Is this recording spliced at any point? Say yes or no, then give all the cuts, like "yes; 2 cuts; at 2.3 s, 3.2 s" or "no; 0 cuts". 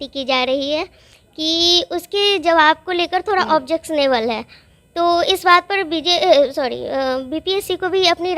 no; 0 cuts